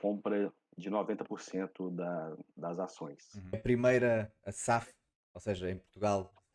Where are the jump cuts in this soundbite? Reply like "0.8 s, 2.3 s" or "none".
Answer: 3.6 s